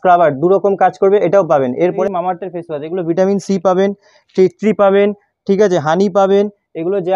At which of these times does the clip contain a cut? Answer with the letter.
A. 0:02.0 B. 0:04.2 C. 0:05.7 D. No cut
A